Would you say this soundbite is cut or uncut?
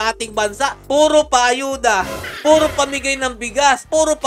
uncut